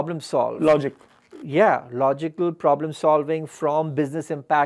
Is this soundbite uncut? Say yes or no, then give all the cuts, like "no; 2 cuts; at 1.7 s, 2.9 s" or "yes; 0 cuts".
yes; 0 cuts